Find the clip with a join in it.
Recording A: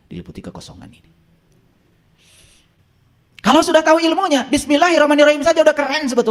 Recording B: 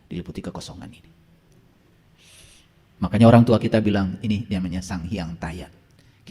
A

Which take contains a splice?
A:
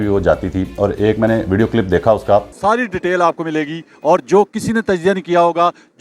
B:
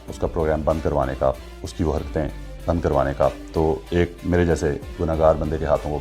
A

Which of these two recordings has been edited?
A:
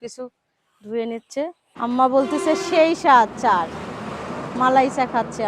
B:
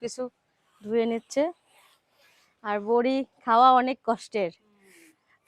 A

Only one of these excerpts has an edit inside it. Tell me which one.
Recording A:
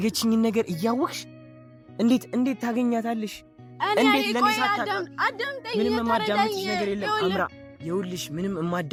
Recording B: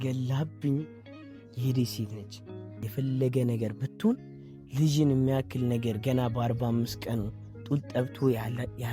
B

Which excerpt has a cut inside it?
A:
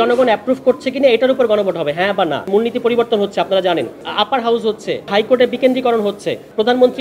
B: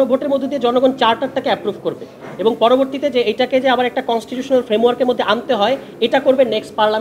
A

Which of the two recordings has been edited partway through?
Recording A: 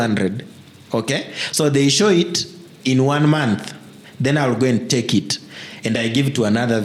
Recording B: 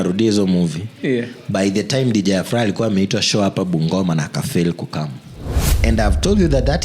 B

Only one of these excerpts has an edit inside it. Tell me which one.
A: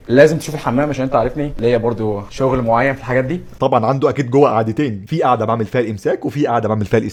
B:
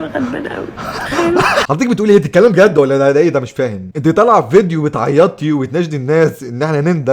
B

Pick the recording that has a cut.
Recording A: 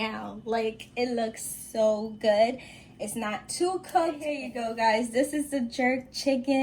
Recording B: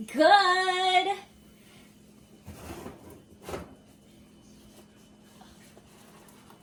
A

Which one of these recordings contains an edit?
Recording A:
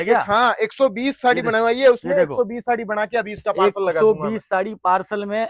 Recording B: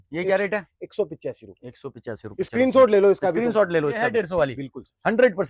B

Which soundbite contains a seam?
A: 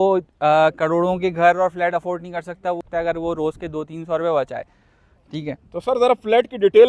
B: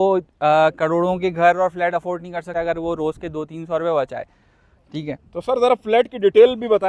B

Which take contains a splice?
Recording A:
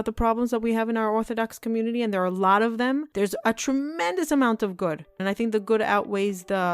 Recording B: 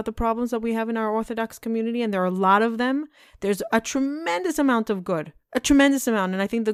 A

